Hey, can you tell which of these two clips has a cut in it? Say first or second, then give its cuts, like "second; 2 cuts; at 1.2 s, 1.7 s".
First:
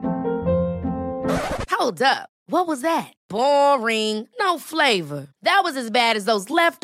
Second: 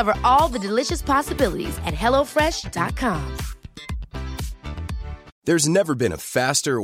second; 1 cut; at 5.3 s